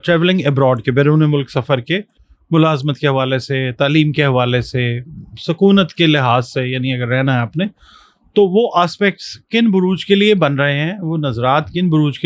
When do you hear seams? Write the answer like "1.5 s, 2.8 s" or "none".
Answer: none